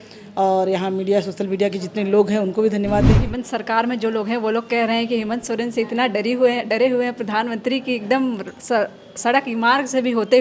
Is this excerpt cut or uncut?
cut